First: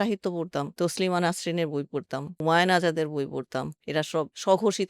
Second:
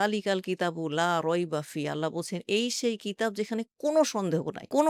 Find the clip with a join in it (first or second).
first